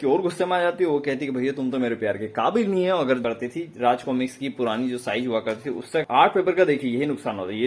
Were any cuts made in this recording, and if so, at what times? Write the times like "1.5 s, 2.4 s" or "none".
3.2 s, 6.0 s